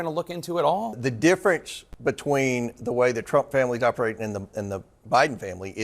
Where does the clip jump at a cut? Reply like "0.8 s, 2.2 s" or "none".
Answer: 1.0 s